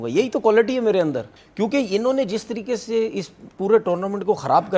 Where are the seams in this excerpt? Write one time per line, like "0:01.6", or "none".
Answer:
0:01.3